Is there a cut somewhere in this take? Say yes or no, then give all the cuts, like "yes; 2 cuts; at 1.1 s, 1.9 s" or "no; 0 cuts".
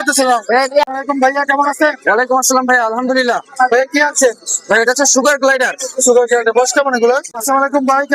yes; 2 cuts; at 0.9 s, 7.3 s